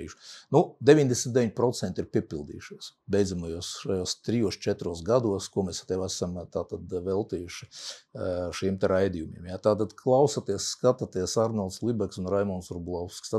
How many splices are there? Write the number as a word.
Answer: zero